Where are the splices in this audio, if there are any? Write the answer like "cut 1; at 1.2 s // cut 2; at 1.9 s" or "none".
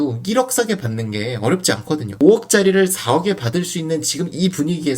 cut 1; at 2.2 s